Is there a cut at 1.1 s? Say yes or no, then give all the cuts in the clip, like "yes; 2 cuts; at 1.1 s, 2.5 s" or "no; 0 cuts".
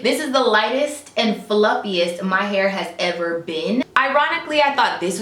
no; 1 cut; at 3.9 s